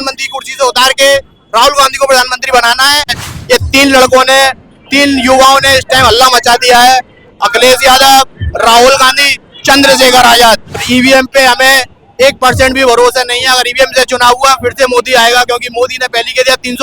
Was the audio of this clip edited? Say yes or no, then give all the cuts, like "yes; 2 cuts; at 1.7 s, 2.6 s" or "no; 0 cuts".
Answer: yes; 2 cuts; at 3.2 s, 10.7 s